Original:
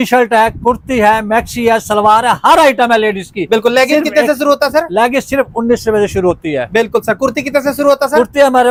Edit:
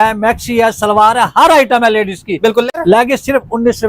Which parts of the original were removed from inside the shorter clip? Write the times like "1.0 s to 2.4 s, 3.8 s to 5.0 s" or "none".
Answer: 3.8 s to 4.8 s